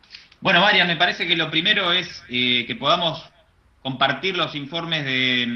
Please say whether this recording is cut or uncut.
cut